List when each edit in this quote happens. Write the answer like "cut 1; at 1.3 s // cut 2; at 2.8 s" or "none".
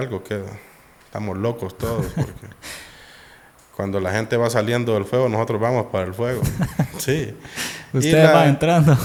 none